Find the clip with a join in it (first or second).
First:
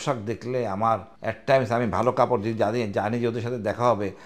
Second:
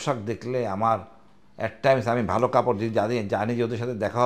first